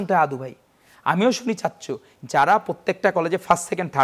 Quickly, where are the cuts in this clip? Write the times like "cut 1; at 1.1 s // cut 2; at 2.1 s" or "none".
cut 1; at 2.1 s

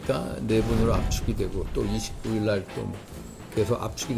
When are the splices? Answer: none

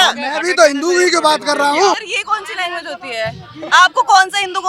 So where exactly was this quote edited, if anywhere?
cut 1; at 2.1 s

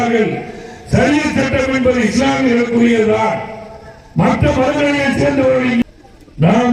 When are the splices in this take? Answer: cut 1; at 5.8 s

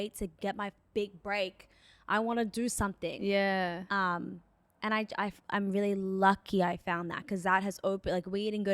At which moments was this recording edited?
none

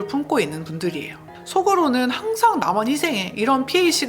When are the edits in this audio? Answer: cut 1; at 1.5 s

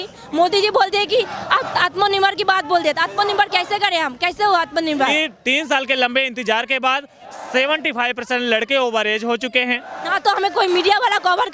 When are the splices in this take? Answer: cut 1; at 5.1 s // cut 2; at 10.1 s

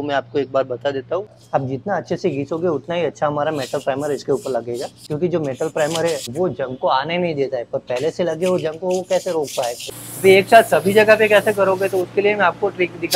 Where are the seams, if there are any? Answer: cut 1; at 1.3 s // cut 2; at 5.0 s // cut 3; at 6.3 s // cut 4; at 9.9 s

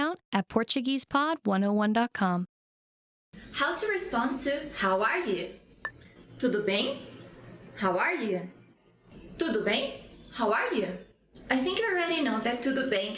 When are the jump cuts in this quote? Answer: cut 1; at 3.2 s

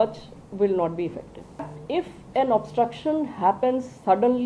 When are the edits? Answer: cut 1; at 1.7 s

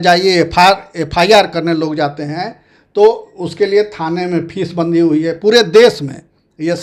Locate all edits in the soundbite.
none

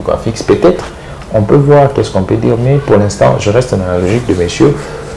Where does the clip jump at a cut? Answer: none

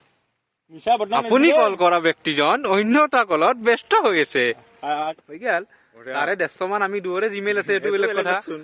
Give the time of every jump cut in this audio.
cut 1; at 5.2 s

